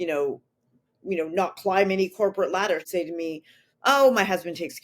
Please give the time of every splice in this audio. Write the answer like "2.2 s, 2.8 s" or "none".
2.8 s